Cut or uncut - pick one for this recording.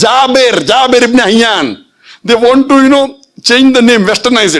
uncut